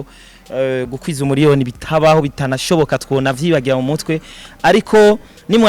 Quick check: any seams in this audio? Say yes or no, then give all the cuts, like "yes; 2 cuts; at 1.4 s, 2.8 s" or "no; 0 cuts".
no; 0 cuts